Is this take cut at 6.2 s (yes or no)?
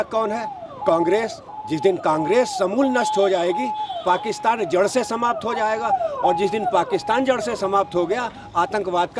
no